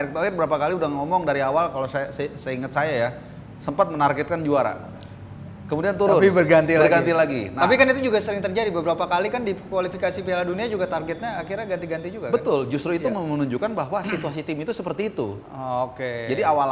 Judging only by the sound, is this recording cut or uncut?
uncut